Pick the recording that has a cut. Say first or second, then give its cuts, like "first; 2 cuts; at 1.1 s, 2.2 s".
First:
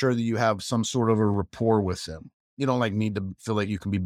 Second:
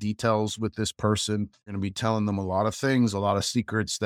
second; 1 cut; at 1.7 s